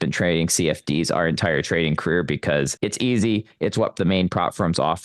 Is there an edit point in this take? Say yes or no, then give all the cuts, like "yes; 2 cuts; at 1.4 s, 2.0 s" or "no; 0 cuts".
yes; 2 cuts; at 2.7 s, 4.0 s